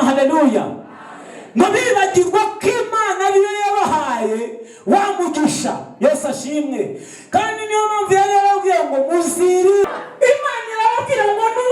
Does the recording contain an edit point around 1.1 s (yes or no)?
no